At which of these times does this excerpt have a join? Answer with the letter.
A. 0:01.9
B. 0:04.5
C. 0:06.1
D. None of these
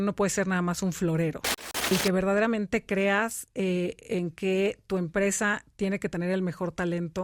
A